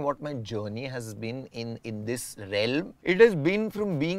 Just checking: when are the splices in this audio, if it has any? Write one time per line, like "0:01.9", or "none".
0:02.9